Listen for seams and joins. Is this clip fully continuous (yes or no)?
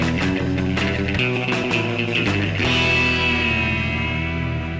yes